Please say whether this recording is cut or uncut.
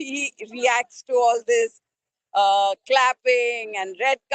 uncut